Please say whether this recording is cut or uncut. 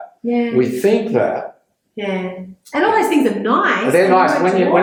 uncut